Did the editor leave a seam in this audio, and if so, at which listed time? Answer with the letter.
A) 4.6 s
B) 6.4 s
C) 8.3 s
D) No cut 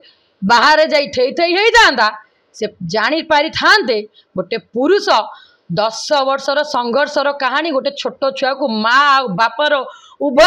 D